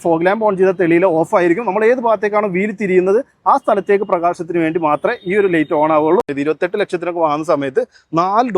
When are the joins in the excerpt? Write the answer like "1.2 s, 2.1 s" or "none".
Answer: 6.3 s